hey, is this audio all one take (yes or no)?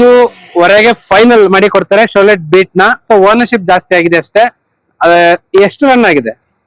yes